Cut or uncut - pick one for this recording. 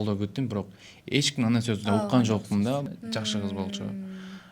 cut